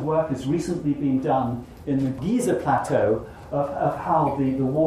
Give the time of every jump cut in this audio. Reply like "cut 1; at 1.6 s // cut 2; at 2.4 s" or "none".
cut 1; at 2.2 s